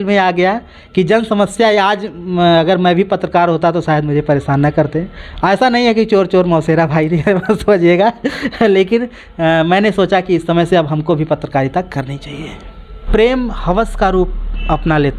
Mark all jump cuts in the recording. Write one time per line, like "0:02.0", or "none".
0:13.0